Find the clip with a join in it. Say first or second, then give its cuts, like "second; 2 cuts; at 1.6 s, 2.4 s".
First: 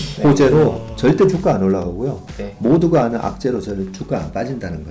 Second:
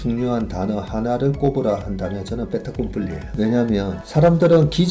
second; 2 cuts; at 3.3 s, 4.0 s